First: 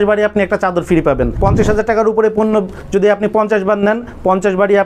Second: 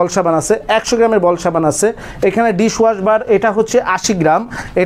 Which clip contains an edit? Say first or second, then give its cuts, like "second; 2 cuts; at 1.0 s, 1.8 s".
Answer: first; 1 cut; at 1.4 s